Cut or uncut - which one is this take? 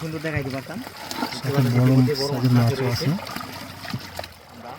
cut